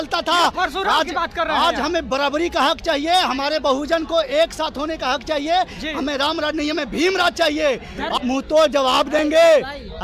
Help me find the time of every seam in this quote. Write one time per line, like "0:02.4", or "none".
0:08.1